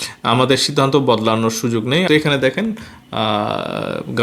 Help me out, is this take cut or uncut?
cut